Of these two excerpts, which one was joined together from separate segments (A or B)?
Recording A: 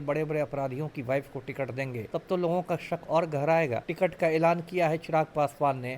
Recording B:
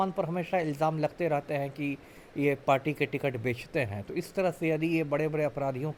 A